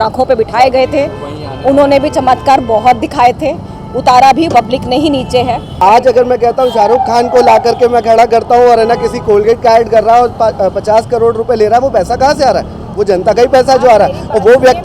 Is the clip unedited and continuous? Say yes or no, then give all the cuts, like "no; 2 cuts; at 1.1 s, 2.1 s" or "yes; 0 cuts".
no; 1 cut; at 5.7 s